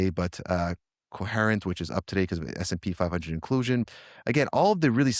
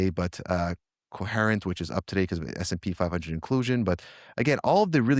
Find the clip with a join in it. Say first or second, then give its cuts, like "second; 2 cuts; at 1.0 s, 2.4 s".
first; 1 cut; at 3.9 s